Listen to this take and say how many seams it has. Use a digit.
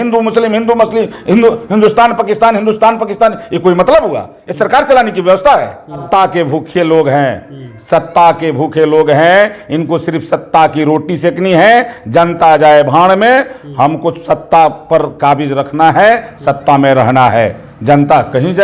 1